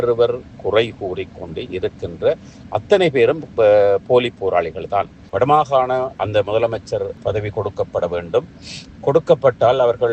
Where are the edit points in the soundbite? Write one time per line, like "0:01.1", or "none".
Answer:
0:05.2